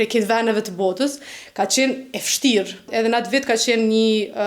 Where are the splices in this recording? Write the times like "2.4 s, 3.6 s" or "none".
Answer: 2.9 s